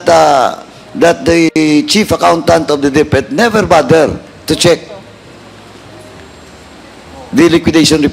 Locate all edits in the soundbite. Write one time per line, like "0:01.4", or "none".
none